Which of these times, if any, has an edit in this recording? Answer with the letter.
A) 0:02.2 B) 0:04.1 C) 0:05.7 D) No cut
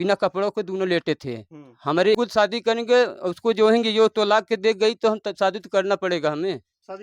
A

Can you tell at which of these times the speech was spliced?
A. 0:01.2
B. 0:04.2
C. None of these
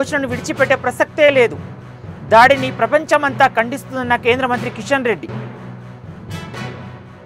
C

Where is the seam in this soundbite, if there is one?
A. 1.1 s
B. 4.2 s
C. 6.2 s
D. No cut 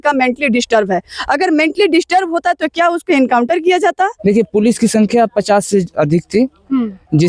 B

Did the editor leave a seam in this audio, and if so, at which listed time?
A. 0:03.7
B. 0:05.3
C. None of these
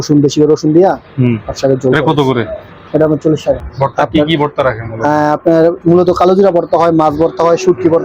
A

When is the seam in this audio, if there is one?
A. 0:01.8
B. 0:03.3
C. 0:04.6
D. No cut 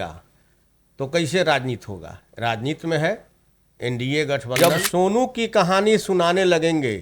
C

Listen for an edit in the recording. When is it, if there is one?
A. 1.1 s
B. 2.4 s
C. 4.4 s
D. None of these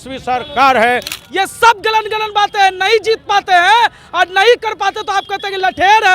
A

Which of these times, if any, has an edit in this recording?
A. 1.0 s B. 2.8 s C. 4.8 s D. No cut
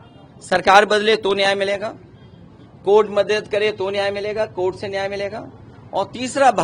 D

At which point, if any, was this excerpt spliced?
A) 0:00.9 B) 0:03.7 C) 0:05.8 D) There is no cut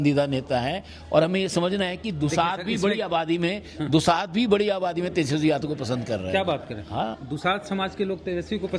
D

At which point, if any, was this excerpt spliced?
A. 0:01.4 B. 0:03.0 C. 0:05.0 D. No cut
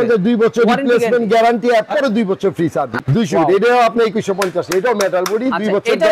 B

